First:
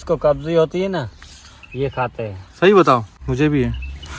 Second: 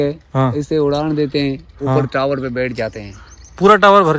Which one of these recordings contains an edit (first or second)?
first